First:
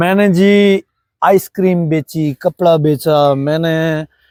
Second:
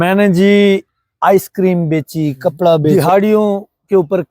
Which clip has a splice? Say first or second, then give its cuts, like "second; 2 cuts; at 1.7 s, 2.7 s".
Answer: second; 1 cut; at 2.9 s